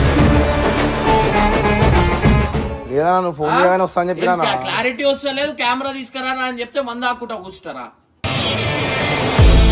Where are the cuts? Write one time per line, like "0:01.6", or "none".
0:02.8

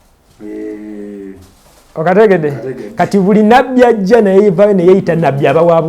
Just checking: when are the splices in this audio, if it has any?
none

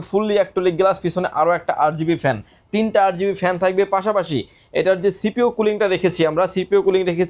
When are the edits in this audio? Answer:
none

